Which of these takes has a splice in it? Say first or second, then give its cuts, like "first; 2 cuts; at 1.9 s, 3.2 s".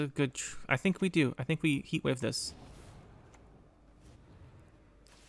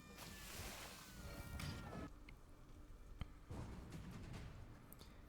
second; 1 cut; at 2.1 s